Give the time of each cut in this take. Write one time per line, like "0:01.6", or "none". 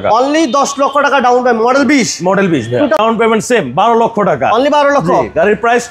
0:03.0